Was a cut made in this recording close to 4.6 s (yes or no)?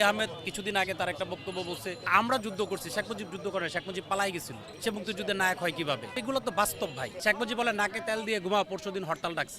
yes